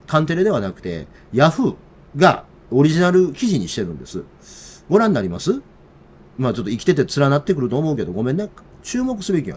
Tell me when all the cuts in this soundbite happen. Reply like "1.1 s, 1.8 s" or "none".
8.6 s